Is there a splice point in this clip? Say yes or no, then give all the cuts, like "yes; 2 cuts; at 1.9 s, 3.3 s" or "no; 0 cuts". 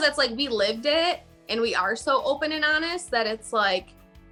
no; 0 cuts